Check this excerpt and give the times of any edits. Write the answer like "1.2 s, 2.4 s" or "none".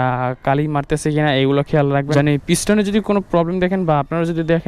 2.1 s